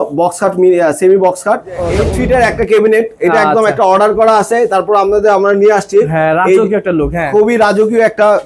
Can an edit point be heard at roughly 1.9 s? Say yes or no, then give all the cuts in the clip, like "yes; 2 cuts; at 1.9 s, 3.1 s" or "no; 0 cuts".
yes; 1 cut; at 1.9 s